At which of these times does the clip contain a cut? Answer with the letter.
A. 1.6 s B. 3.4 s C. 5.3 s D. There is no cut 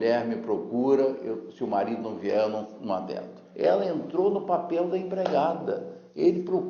B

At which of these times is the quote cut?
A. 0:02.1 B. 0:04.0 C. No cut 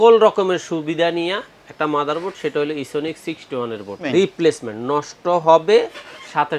B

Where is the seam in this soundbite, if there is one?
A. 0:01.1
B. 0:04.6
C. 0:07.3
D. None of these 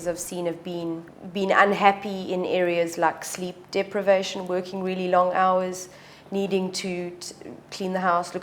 A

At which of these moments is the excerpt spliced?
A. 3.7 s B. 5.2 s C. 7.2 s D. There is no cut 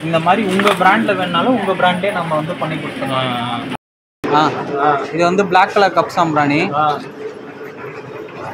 A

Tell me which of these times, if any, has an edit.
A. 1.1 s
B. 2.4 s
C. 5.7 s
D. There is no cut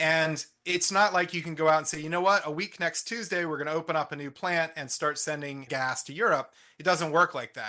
C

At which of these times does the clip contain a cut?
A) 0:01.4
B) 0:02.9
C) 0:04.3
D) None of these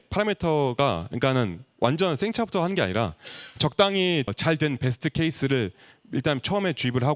C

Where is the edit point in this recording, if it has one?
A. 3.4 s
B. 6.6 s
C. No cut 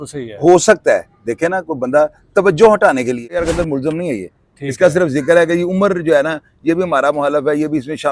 A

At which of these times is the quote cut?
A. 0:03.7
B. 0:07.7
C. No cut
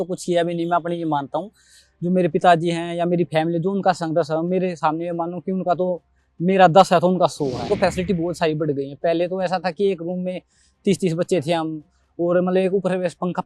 B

